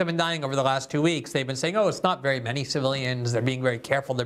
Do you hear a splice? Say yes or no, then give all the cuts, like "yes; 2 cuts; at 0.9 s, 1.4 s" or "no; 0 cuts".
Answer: no; 0 cuts